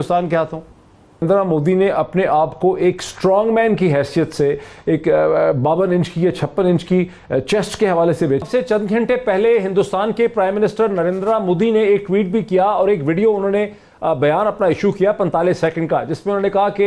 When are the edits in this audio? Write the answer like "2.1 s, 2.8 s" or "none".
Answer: 1.2 s, 8.4 s

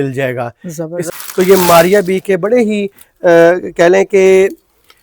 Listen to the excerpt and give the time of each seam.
1.1 s

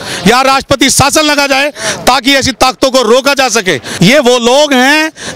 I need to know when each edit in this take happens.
3.9 s

